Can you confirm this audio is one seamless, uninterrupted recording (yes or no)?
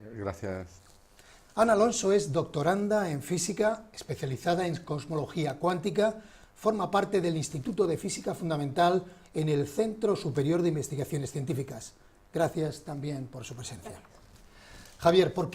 no